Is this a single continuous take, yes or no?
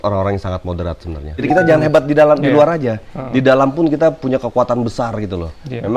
no